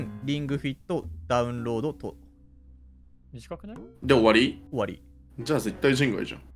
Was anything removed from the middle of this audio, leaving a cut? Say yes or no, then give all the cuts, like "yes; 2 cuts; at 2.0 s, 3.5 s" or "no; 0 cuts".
no; 0 cuts